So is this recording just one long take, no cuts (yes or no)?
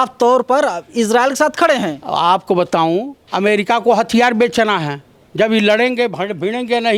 yes